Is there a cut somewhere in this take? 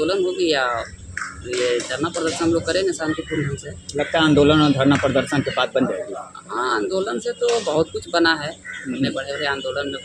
no; 0 cuts

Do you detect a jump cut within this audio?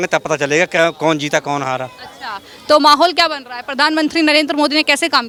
no; 0 cuts

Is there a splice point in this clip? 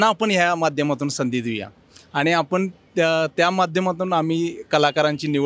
no; 0 cuts

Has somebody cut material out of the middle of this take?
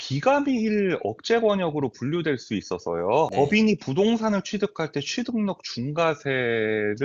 yes; 1 cut; at 3.3 s

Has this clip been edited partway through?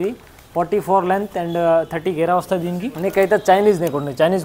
yes; 1 cut; at 2.9 s

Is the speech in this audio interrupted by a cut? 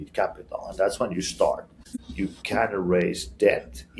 yes; 1 cut; at 1.9 s

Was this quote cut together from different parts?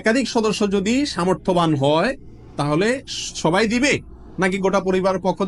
no; 0 cuts

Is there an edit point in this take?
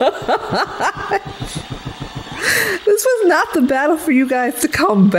no; 0 cuts

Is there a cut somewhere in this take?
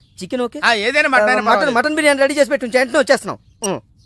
no; 0 cuts

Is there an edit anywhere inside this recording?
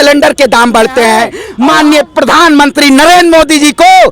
yes; 1 cut; at 1.4 s

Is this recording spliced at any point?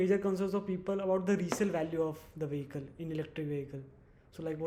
no; 0 cuts

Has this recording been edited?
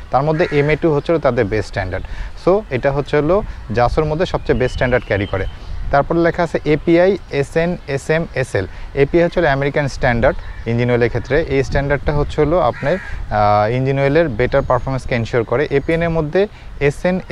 no; 0 cuts

